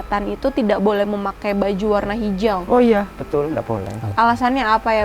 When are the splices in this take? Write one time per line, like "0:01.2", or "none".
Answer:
0:04.0